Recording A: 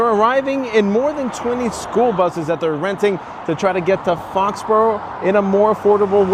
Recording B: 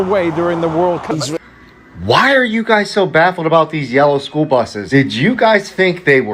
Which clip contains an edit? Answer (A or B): B